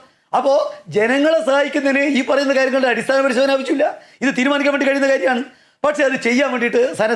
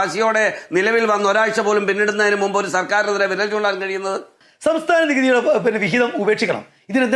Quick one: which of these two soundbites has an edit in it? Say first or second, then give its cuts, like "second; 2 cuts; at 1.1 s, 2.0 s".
second; 1 cut; at 4.4 s